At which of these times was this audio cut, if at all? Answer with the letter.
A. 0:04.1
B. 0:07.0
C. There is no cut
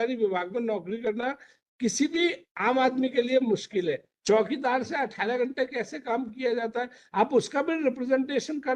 A